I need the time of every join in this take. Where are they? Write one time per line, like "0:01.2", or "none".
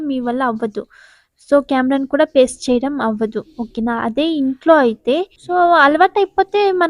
0:05.4